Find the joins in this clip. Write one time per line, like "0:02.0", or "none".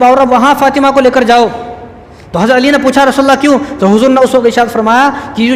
none

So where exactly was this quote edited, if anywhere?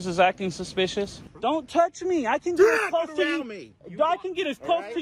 0:01.1

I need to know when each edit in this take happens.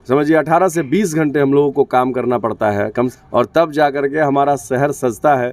0:03.1

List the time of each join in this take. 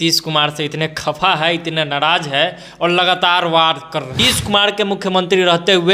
0:04.2

